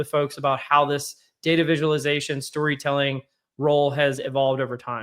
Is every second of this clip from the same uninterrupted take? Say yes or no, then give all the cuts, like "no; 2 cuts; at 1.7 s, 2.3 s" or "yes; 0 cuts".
yes; 0 cuts